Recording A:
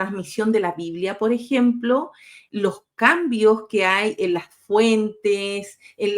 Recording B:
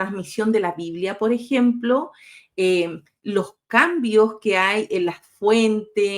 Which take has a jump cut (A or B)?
A